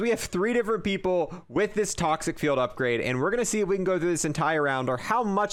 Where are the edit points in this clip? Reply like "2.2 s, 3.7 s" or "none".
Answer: none